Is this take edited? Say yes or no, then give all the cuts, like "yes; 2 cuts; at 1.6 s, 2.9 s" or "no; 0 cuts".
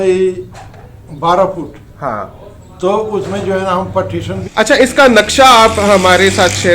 yes; 1 cut; at 4.4 s